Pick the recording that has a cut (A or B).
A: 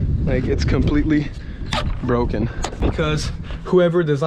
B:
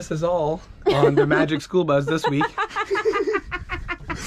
A